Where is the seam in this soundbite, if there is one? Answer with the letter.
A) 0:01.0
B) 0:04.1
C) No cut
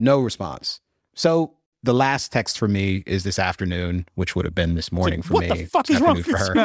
C